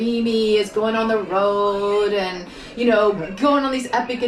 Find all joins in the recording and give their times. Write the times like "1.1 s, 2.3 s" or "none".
none